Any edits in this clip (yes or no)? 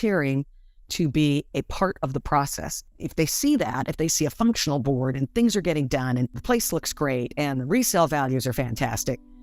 yes